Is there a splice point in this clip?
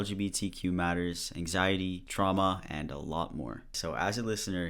yes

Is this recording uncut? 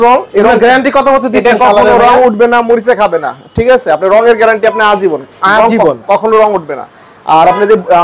yes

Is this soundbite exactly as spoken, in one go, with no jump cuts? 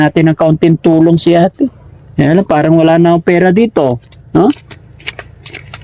yes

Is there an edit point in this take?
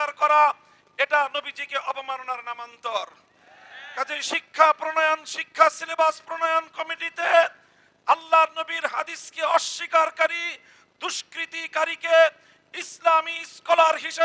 no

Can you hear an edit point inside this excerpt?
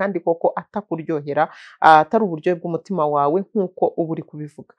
no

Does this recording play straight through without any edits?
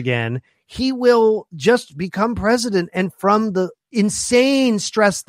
no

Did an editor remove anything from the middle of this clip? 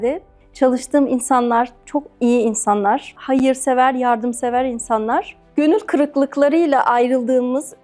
yes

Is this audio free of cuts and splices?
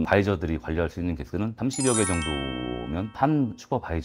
yes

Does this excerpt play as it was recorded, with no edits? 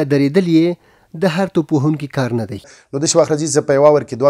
no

